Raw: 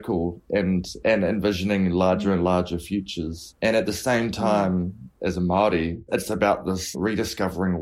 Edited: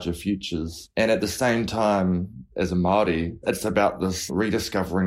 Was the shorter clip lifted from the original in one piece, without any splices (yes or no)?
yes